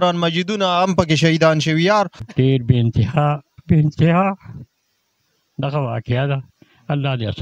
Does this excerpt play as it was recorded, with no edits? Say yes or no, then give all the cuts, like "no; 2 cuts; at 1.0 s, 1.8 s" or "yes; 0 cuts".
no; 1 cut; at 2.2 s